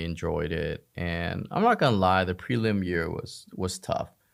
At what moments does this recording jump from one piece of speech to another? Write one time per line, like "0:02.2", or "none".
none